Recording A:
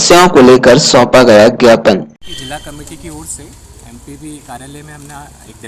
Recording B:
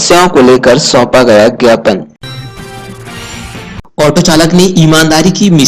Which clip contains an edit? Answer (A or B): B